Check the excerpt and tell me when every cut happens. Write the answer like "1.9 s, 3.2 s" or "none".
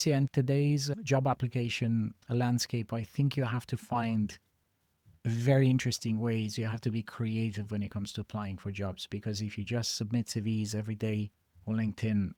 none